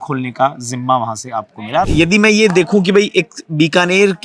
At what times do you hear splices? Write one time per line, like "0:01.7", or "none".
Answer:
0:01.8